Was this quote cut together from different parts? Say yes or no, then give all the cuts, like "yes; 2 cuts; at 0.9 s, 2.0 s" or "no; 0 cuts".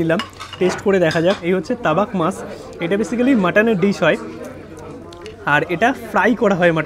yes; 1 cut; at 1.4 s